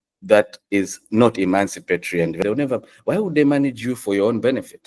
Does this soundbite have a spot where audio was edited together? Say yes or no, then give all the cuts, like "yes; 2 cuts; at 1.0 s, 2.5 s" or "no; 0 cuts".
yes; 1 cut; at 2.4 s